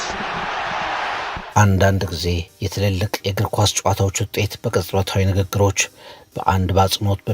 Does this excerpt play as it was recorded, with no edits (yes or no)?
no